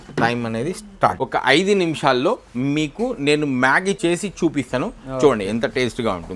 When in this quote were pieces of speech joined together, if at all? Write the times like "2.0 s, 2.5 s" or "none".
1.1 s, 4.0 s